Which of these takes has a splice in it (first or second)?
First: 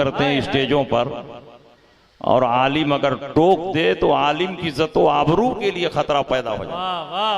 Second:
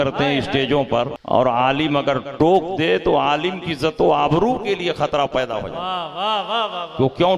second